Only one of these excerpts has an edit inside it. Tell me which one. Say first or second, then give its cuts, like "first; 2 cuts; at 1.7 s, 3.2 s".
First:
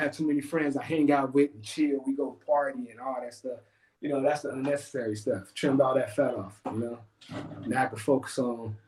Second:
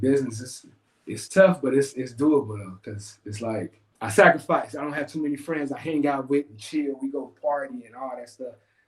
second; 1 cut; at 3.8 s